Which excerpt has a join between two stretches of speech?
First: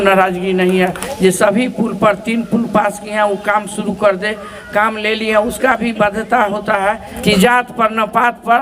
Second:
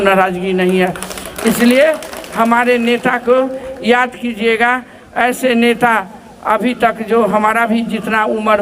first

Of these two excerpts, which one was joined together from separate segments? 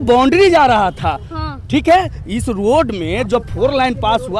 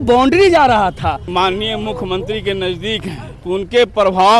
second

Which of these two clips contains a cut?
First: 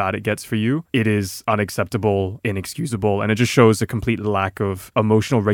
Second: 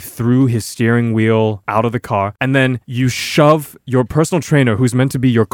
second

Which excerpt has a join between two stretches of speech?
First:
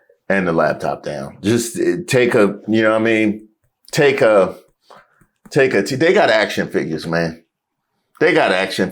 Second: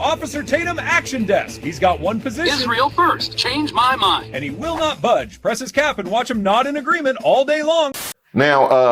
second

